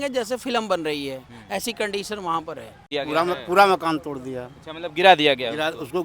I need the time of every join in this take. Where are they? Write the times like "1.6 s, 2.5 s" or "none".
2.9 s